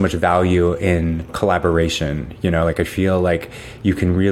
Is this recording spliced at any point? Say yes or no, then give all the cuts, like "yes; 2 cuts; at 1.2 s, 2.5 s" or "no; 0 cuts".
yes; 1 cut; at 1.3 s